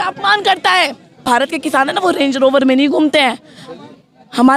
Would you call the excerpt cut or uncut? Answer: cut